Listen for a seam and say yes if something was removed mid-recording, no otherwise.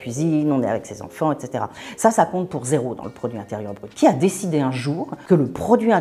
yes